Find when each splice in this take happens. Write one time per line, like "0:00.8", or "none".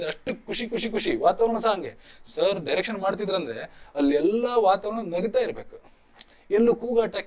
none